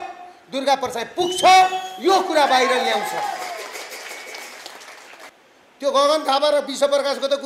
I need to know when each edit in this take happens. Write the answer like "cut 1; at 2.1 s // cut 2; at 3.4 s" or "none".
cut 1; at 5.3 s